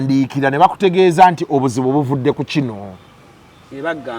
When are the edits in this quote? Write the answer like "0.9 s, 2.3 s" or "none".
none